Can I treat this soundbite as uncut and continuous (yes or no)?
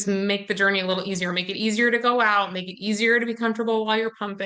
yes